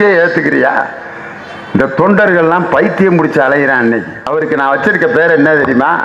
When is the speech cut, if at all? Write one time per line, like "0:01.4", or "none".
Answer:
0:04.3